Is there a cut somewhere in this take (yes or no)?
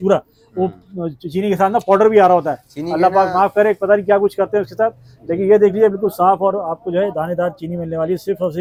no